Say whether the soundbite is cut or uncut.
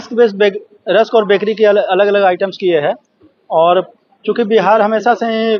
uncut